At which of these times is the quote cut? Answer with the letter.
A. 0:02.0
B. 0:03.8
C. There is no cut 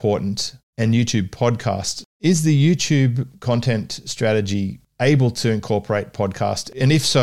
A